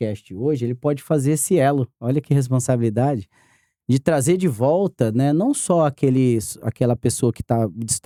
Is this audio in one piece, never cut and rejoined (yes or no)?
yes